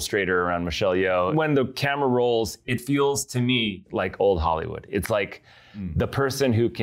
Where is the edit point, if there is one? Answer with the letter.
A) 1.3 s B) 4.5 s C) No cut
A